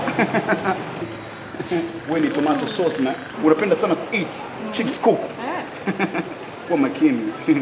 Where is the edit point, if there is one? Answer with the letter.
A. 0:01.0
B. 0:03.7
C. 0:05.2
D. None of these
A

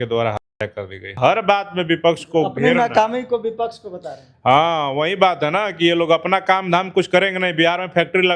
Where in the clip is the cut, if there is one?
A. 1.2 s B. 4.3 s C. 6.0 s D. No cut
A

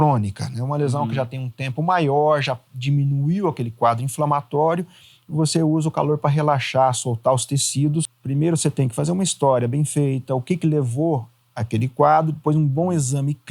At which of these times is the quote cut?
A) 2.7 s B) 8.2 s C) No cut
B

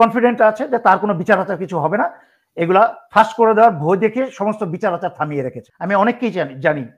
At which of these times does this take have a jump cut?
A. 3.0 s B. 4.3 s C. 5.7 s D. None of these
C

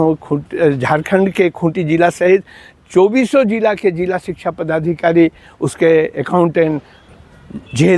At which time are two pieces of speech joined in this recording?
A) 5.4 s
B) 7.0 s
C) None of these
B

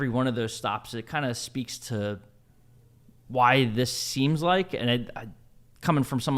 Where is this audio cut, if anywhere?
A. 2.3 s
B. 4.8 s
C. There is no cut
C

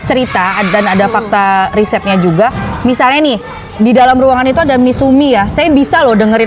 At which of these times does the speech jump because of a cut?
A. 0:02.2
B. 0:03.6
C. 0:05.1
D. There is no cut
D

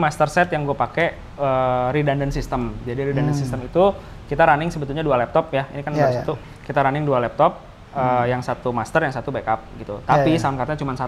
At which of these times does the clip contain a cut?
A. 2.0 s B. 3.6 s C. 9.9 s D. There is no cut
D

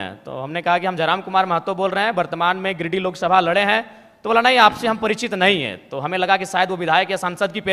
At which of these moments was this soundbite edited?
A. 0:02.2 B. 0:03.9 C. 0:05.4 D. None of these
D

